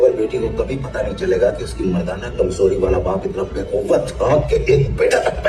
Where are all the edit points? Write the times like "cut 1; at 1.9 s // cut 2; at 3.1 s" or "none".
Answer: none